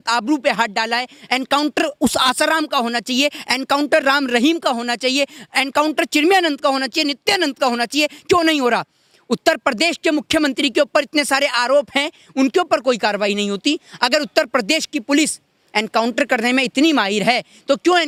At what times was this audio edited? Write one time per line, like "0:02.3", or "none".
none